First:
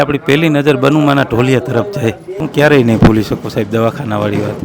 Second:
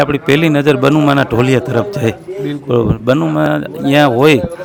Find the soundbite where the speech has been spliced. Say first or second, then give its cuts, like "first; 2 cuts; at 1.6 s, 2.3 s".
first; 1 cut; at 2.4 s